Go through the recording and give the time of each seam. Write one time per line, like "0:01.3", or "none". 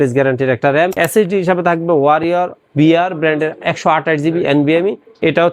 0:01.0

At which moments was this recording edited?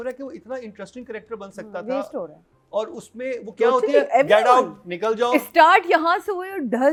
none

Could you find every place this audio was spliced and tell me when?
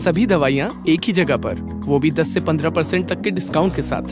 none

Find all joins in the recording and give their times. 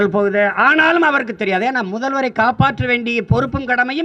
none

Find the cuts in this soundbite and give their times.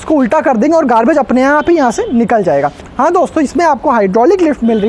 0:02.8

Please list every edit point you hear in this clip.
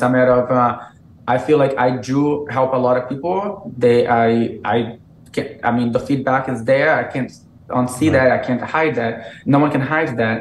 none

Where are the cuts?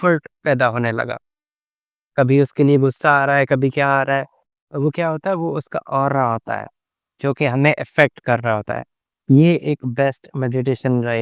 0:09.1

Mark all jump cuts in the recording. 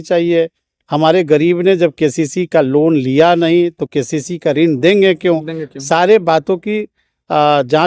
none

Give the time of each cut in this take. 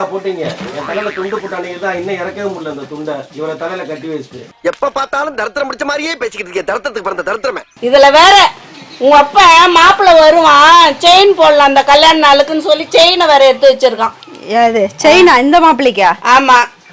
0:07.7

